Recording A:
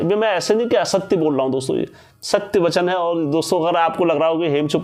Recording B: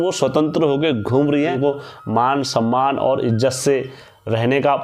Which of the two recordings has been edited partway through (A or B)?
B